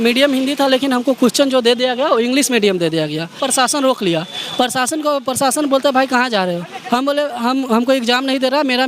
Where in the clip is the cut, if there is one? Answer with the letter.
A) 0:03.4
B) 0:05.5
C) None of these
A